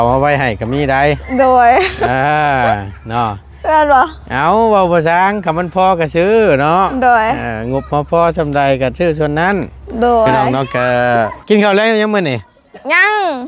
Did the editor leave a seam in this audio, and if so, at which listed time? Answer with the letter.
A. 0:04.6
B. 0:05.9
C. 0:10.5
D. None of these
C